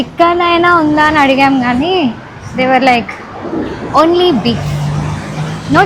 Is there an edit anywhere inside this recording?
no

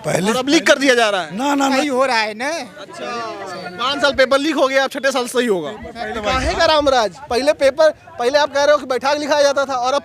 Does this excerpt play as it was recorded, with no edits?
no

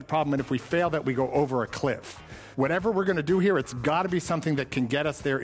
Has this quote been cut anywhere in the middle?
yes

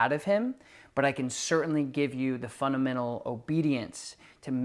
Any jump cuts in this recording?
no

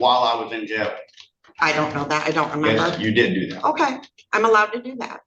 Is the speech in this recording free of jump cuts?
yes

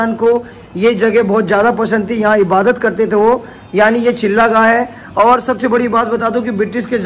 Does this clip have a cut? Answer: no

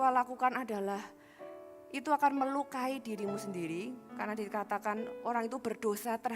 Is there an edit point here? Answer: no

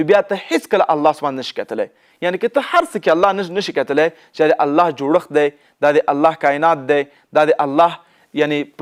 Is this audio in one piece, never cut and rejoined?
yes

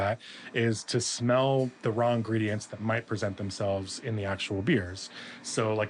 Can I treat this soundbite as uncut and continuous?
yes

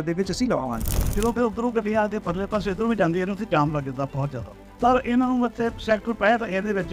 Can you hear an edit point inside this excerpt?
yes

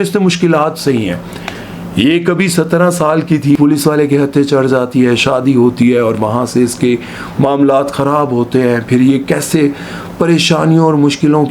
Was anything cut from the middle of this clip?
yes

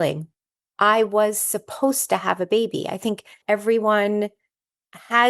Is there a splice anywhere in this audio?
yes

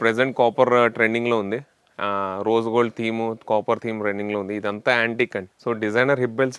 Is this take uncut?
no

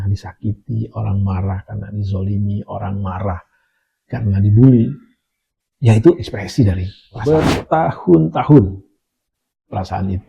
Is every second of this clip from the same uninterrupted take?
no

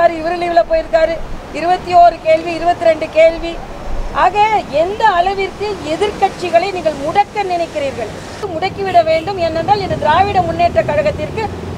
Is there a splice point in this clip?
yes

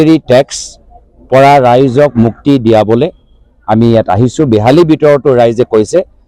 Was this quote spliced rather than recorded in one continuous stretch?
no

